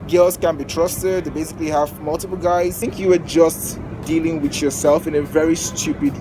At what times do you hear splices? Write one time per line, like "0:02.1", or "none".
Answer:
0:02.9